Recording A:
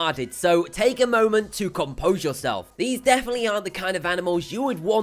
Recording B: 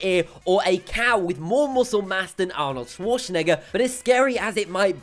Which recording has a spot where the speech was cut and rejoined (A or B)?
B